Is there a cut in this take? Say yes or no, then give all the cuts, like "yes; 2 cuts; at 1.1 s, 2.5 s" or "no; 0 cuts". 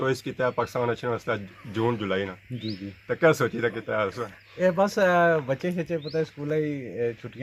no; 0 cuts